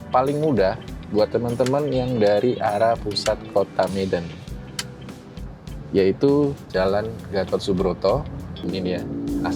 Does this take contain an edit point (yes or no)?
yes